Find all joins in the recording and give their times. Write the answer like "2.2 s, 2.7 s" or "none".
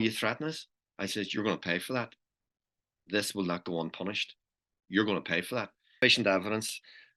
6.0 s

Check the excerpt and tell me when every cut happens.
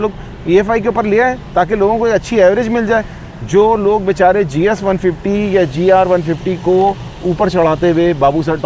none

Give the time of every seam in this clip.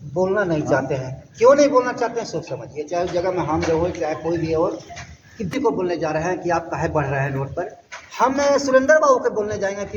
none

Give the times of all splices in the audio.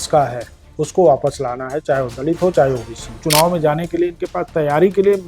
3.2 s

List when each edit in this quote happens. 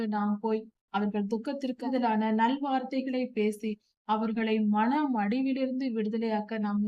1.9 s

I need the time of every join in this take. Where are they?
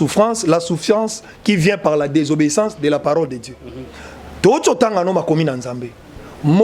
none

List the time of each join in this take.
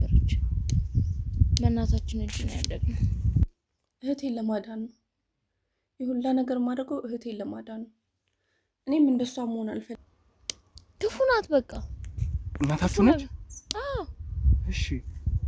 3.4 s, 9.9 s

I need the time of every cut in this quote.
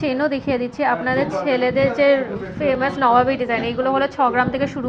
none

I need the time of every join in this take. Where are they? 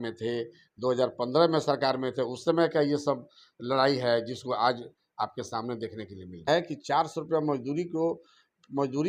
6.5 s

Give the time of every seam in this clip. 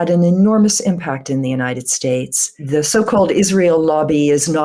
2.6 s

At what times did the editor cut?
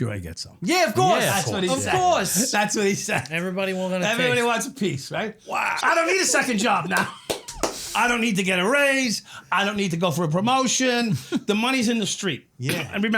5.8 s

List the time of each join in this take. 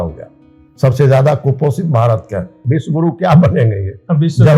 2.5 s

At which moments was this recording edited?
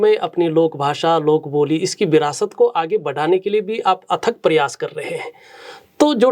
none

